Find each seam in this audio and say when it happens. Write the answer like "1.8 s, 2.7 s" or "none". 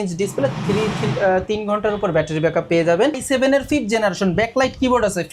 3.2 s